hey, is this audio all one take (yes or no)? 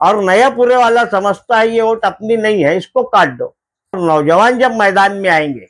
no